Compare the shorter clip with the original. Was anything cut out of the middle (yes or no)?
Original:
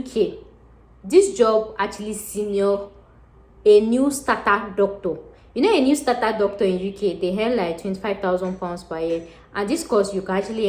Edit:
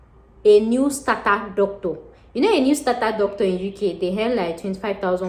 no